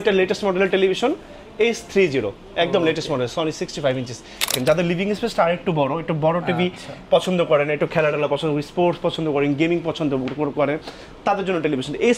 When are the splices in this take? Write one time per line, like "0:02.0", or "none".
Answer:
0:04.5